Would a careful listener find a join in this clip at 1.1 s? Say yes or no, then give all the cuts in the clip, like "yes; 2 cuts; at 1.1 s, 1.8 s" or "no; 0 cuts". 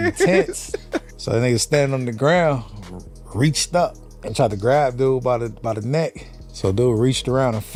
no; 0 cuts